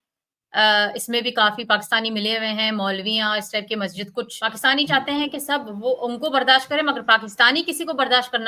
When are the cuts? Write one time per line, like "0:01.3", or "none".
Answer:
0:04.4

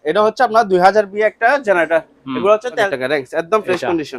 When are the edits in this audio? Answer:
0:02.9

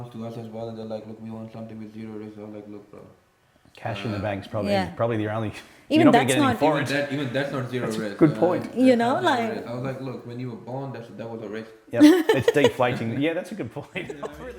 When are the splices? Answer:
none

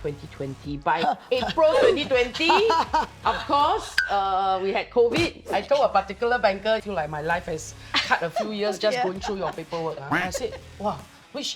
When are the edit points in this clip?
0:05.4
0:06.8
0:10.2

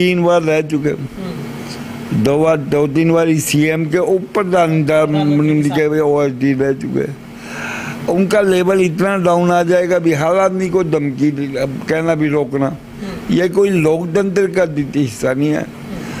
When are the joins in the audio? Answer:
none

